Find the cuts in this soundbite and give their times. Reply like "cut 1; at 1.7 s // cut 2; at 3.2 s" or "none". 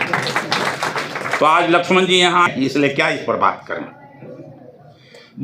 cut 1; at 2.5 s

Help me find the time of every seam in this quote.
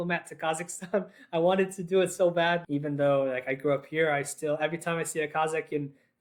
cut 1; at 2.6 s

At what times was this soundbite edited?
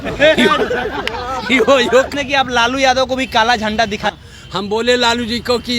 cut 1; at 2.1 s // cut 2; at 4.1 s

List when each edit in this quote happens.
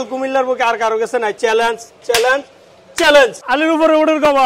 cut 1; at 3.5 s

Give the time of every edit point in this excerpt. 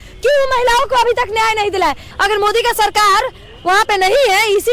cut 1; at 2.1 s

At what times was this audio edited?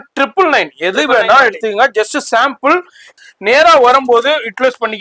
cut 1; at 3.2 s

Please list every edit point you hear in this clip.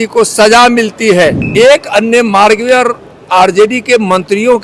cut 1; at 1.4 s

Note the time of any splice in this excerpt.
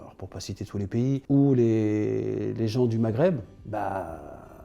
cut 1; at 1.2 s // cut 2; at 2.5 s // cut 3; at 3.5 s

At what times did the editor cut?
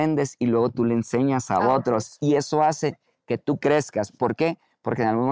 none

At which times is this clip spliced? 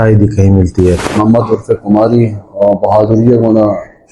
cut 1; at 1.1 s

